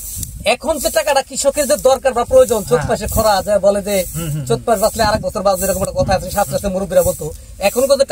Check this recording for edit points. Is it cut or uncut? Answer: uncut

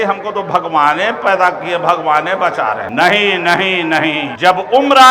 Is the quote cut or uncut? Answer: cut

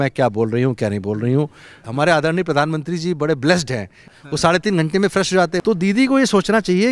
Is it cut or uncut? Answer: cut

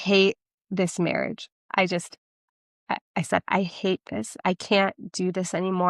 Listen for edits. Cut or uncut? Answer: cut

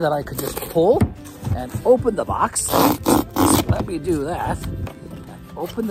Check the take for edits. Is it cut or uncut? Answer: uncut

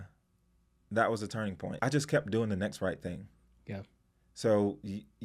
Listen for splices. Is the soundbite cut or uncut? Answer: cut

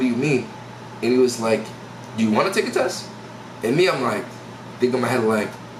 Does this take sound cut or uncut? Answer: uncut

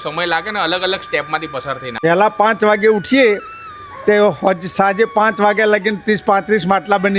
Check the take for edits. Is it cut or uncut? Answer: cut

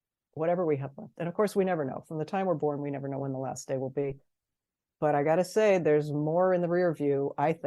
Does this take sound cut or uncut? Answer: uncut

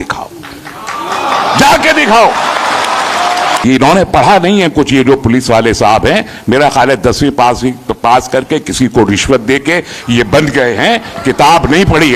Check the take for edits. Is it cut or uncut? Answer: cut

